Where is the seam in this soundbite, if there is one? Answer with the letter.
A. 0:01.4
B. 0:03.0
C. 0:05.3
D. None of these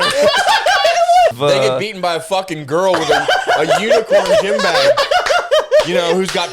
A